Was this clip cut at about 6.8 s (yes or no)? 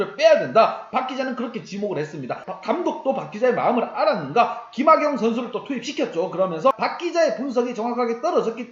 yes